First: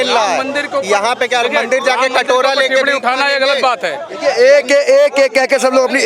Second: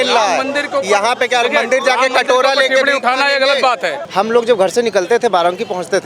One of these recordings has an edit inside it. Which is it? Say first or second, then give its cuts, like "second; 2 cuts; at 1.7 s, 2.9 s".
second; 1 cut; at 4.0 s